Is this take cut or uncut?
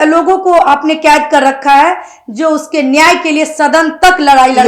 uncut